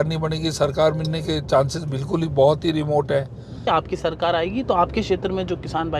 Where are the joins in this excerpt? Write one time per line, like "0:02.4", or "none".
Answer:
0:03.6